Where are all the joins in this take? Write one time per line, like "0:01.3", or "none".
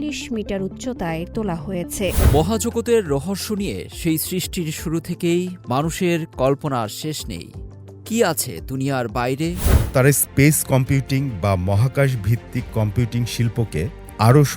0:02.2
0:09.7